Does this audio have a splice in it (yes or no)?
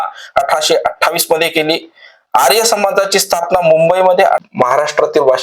yes